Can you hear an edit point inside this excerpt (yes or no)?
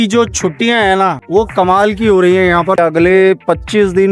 yes